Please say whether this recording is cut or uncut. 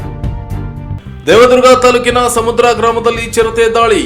cut